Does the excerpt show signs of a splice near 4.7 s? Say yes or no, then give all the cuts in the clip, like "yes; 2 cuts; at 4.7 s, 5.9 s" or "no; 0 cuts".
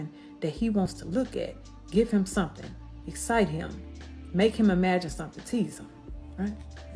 no; 1 cut; at 3.2 s